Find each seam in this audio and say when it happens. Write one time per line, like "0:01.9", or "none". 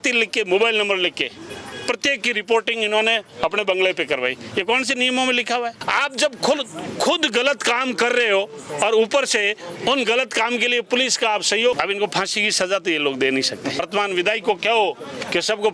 0:05.8
0:11.8
0:13.8